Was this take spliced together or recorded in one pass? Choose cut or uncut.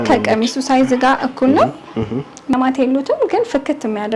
cut